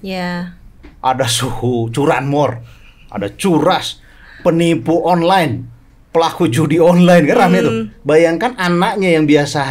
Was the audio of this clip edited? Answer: no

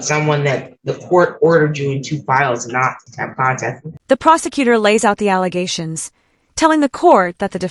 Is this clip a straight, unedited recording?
yes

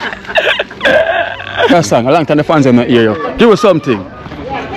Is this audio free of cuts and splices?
no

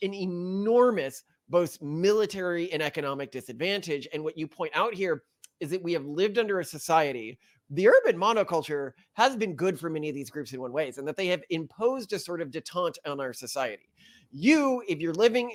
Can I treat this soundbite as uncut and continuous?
yes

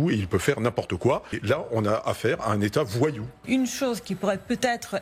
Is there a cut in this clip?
yes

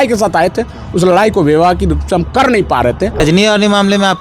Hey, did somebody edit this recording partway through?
yes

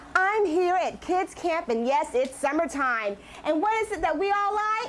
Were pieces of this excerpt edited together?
no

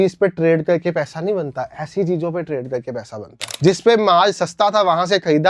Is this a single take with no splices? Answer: no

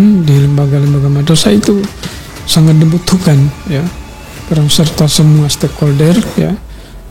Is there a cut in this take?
no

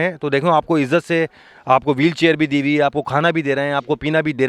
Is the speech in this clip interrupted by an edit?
no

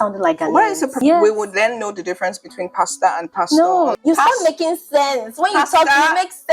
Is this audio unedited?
no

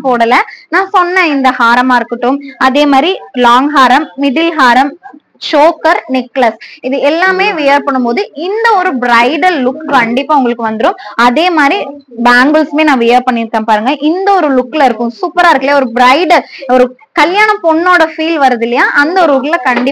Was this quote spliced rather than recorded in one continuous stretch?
no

